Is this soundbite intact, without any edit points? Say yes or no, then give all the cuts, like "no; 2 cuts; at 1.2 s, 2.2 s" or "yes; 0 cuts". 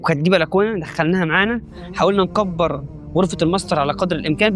yes; 0 cuts